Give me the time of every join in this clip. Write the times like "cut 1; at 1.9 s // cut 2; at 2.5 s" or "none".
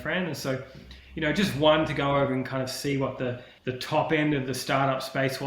cut 1; at 3.5 s